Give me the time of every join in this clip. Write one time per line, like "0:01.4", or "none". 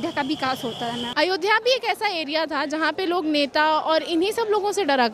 0:01.0